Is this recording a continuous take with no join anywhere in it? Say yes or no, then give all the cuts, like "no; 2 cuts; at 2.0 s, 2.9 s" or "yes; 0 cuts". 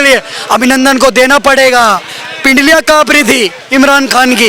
yes; 0 cuts